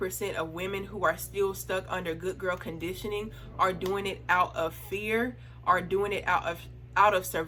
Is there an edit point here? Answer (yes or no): no